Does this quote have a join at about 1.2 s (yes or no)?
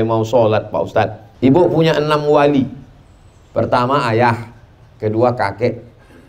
yes